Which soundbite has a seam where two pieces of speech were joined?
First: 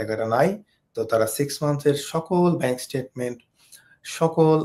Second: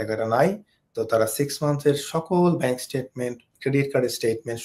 second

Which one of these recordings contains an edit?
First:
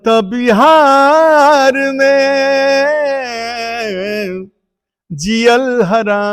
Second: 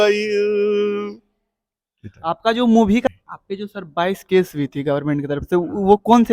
second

